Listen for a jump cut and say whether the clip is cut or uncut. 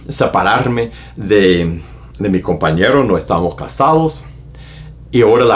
uncut